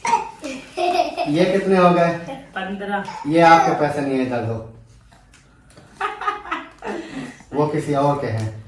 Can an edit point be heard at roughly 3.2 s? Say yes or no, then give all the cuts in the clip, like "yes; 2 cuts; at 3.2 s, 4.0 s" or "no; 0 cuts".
yes; 2 cuts; at 3.2 s, 7.4 s